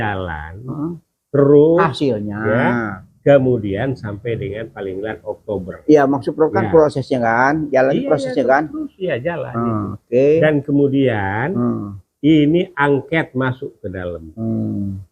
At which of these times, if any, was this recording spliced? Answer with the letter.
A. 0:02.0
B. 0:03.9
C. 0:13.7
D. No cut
D